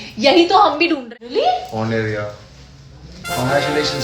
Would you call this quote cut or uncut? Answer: cut